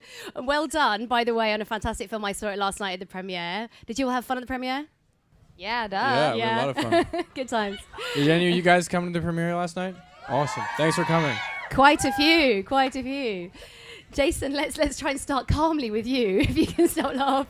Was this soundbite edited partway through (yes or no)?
yes